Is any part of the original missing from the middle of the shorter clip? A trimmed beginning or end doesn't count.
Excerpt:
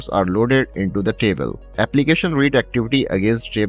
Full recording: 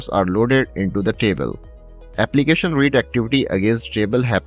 yes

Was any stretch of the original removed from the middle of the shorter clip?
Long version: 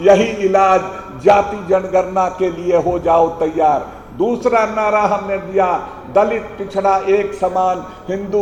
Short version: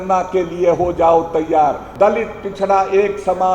yes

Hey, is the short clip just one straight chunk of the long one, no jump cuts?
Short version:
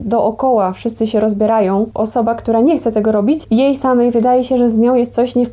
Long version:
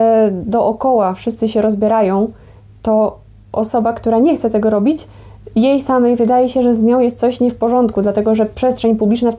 no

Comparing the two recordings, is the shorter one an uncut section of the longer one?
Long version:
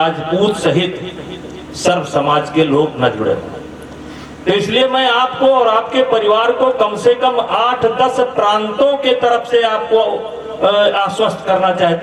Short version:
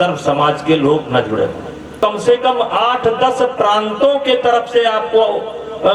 no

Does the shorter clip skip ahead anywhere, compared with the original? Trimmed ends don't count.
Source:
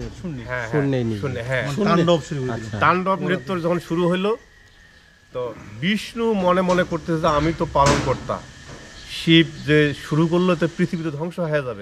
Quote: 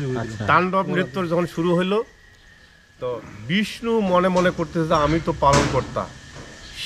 no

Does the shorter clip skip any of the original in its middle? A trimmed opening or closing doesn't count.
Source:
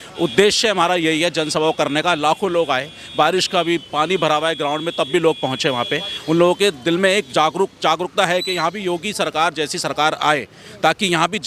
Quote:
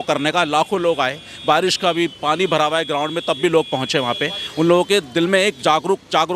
no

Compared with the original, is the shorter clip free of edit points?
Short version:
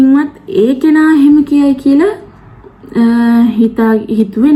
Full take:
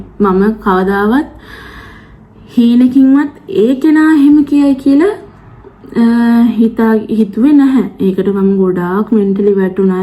yes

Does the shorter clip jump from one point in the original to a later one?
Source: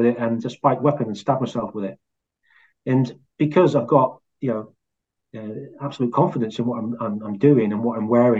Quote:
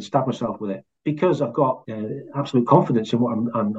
yes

